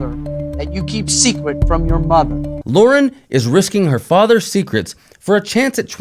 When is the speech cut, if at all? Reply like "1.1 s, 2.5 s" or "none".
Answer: 2.5 s